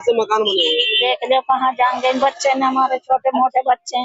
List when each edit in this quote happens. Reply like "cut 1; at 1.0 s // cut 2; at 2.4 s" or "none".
cut 1; at 0.9 s